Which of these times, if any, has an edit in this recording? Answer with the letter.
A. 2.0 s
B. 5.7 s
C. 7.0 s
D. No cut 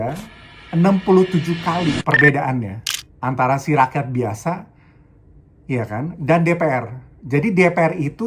A